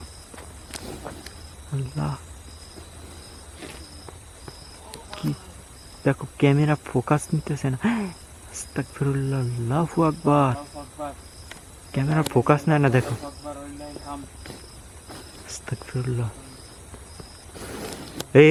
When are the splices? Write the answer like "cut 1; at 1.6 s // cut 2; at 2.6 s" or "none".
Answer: none